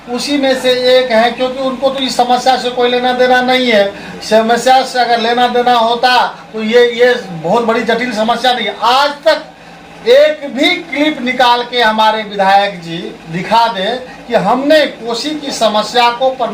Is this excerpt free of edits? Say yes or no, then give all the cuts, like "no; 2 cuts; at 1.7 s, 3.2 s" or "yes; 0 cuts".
yes; 0 cuts